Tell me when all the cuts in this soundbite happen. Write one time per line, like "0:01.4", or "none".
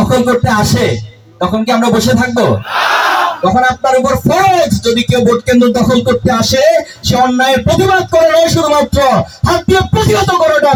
none